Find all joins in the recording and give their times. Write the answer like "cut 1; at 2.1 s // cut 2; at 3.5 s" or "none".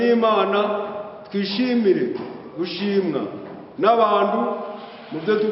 none